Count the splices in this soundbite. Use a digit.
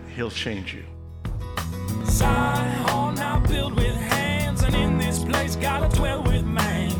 1